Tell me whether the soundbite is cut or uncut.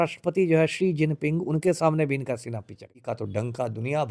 cut